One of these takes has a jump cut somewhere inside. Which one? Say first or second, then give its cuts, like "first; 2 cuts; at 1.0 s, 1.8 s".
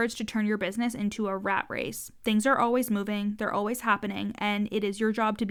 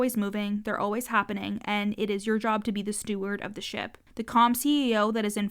second; 1 cut; at 4.0 s